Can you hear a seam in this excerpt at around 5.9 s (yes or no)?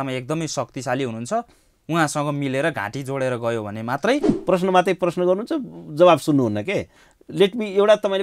no